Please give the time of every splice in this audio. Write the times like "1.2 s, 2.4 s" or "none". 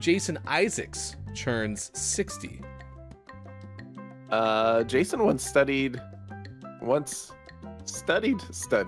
none

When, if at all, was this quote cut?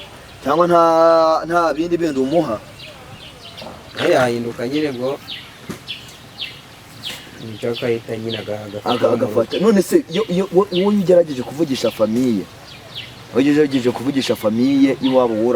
3.9 s

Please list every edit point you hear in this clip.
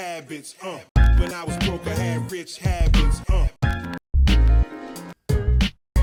none

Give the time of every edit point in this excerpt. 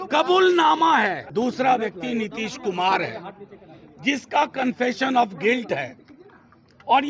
1.2 s

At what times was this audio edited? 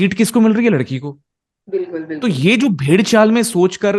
none

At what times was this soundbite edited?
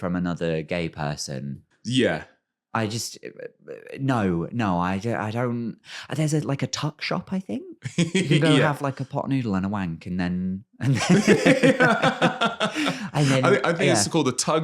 1.7 s

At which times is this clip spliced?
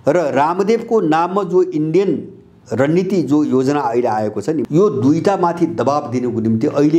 4.6 s

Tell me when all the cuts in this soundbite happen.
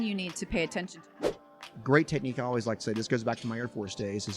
1.3 s

